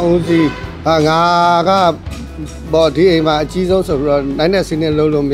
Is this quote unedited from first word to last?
yes; 0 cuts

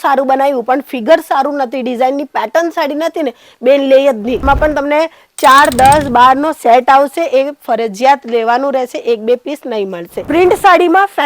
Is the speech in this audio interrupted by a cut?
yes; 2 cuts; at 4.4 s, 10.1 s

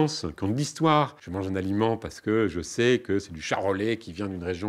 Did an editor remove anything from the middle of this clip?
yes; 1 cut; at 1.2 s

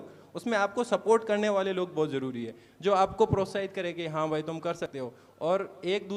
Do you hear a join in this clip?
no; 0 cuts

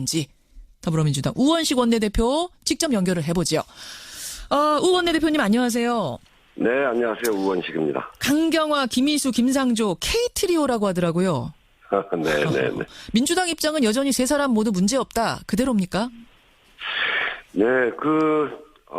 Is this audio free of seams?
no; 1 cut; at 3.4 s

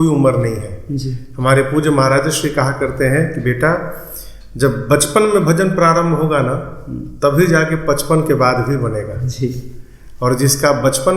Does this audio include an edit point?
no; 0 cuts

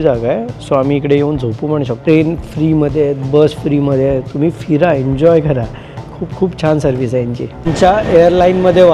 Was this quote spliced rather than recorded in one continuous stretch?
yes; 2 cuts; at 2.0 s, 7.7 s

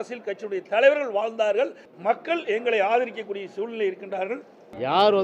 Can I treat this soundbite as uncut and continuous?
yes; 0 cuts

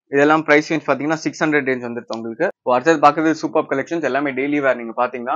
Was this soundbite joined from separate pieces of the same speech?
yes; 1 cut; at 2.6 s

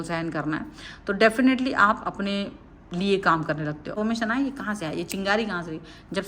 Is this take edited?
yes; 1 cut; at 3.9 s

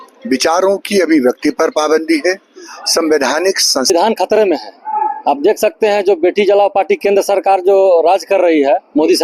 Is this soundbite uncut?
no; 1 cut; at 3.9 s

